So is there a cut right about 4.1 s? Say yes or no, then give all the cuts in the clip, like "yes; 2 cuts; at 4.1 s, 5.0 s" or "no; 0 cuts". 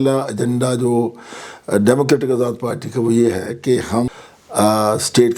yes; 1 cut; at 4.1 s